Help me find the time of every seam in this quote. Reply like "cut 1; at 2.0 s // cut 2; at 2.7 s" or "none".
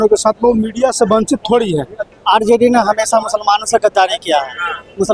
cut 1; at 2.0 s

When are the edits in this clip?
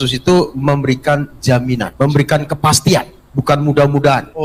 none

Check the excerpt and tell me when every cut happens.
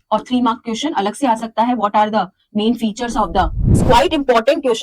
cut 1; at 3.8 s

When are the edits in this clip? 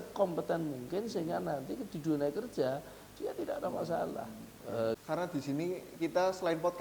cut 1; at 5.0 s

